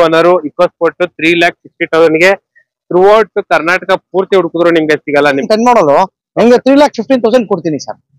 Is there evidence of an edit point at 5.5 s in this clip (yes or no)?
yes